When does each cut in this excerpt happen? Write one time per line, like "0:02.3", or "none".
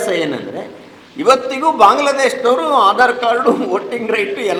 none